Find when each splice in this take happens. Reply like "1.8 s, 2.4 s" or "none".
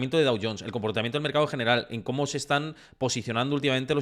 none